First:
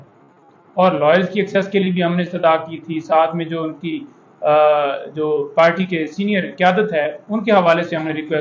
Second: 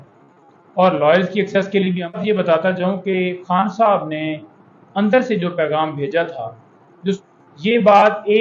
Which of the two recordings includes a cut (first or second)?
second